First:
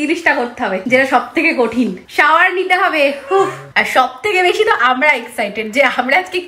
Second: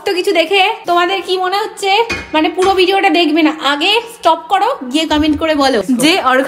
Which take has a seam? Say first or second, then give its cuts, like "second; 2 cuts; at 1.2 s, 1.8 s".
first; 1 cut; at 3.6 s